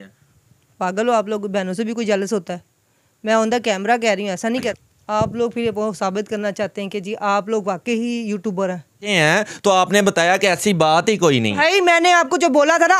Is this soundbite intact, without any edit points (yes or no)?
no